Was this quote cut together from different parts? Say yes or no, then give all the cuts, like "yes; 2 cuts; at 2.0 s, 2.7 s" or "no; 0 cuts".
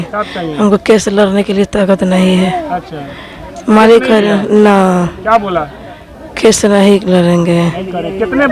no; 0 cuts